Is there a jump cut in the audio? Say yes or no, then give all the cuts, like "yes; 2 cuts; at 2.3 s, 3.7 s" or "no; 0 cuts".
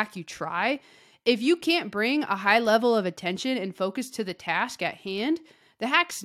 no; 0 cuts